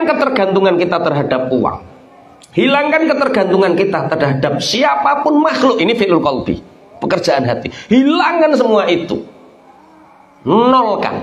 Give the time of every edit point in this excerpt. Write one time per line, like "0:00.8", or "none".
none